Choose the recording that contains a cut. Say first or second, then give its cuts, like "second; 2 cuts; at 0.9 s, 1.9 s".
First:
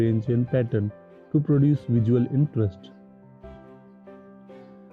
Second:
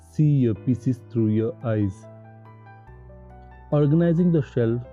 second; 2 cuts; at 1.9 s, 3.4 s